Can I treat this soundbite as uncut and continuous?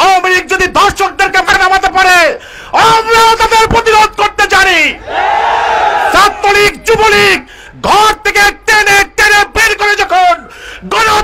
no; 1 cut; at 1.5 s

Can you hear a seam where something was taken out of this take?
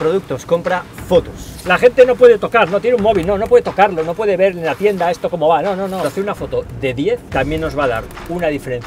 yes; 3 cuts; at 1.4 s, 6.0 s, 7.3 s

